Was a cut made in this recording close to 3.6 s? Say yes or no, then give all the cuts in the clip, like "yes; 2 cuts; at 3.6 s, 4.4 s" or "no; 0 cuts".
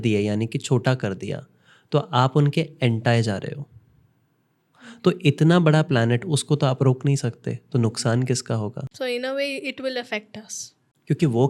no; 0 cuts